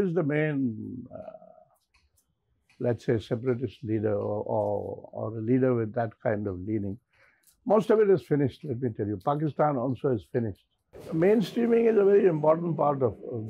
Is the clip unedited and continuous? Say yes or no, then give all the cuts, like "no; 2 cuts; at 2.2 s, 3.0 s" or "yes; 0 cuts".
no; 1 cut; at 10.9 s